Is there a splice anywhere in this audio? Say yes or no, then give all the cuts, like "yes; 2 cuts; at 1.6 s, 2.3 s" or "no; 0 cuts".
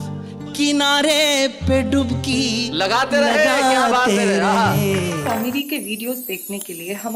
yes; 1 cut; at 5.2 s